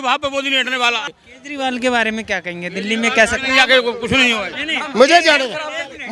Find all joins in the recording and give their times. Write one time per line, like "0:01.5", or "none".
0:01.1